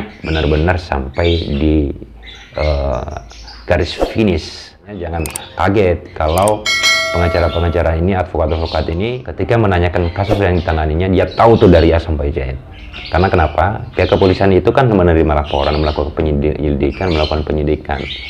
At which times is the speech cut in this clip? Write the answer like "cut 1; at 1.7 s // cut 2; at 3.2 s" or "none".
cut 1; at 5.1 s // cut 2; at 9.2 s